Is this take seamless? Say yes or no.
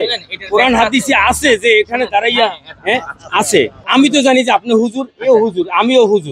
no